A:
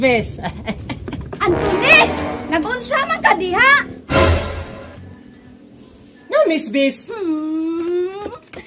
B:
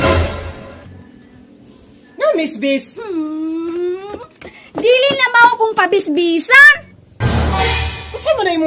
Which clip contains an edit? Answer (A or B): A